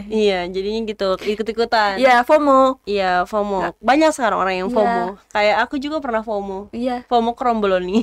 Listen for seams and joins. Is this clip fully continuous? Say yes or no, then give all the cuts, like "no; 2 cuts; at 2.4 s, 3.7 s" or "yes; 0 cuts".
yes; 0 cuts